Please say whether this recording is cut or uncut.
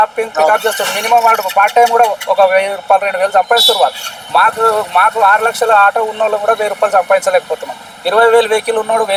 uncut